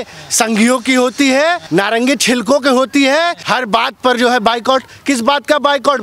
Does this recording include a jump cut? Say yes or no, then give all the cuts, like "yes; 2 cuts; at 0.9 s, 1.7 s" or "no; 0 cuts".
yes; 2 cuts; at 1.6 s, 3.4 s